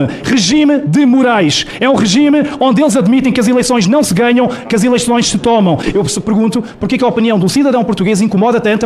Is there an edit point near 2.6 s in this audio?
no; 1 cut; at 5.9 s

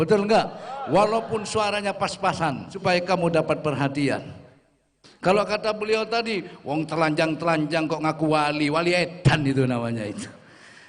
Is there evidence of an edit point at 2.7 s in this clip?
yes; 1 cut; at 2.7 s

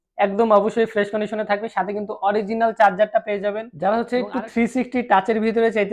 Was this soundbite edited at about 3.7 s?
yes; 1 cut; at 3.7 s

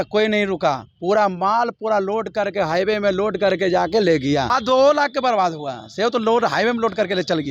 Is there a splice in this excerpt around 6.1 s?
no; 1 cut; at 4.5 s

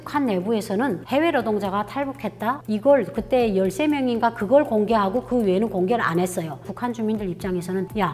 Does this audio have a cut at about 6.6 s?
yes; 1 cut; at 6.6 s

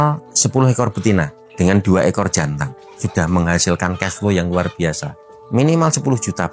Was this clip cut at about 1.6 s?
no; 2 cuts; at 2.9 s, 5.3 s

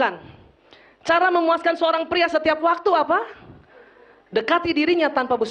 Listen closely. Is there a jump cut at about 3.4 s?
no; 0 cuts

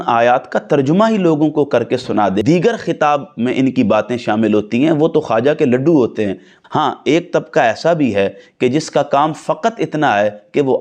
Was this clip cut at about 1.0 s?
no; 2 cuts; at 2.4 s, 6.6 s

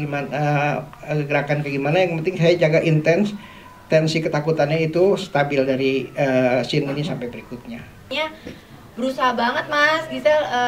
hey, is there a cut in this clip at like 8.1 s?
yes; 1 cut; at 8.1 s

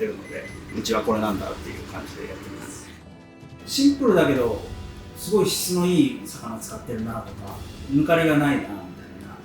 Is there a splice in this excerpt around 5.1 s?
no; 2 cuts; at 3.1 s, 7.8 s

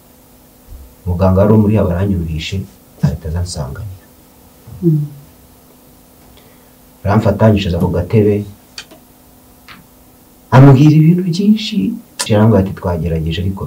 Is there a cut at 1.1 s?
no; 1 cut; at 12.2 s

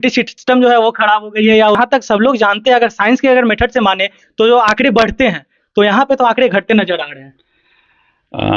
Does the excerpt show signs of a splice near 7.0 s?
no; 1 cut; at 1.8 s

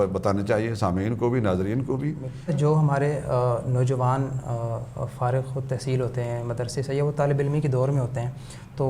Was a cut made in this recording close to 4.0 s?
no; 1 cut; at 2.5 s

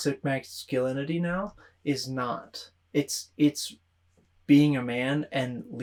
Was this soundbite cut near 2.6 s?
no; 0 cuts

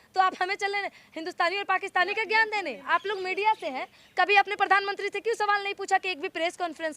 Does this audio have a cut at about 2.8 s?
yes; 1 cut; at 2.8 s

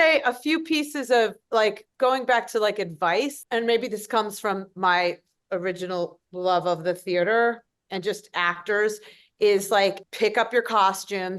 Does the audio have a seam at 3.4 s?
yes; 2 cuts; at 3.4 s, 10.1 s

